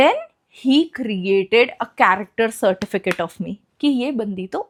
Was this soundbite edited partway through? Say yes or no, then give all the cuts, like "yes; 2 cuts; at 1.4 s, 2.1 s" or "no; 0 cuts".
no; 0 cuts